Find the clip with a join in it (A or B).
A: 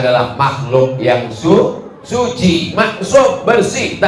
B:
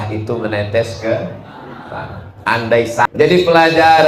B